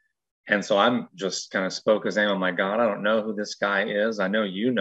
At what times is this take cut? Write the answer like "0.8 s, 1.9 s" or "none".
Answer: none

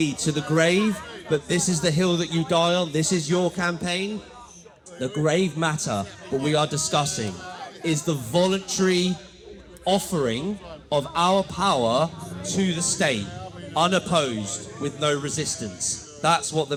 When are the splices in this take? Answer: none

